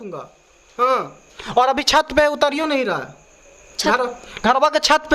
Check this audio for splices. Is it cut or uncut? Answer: uncut